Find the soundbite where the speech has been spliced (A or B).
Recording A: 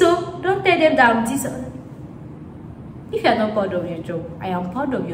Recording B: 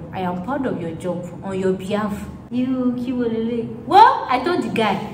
B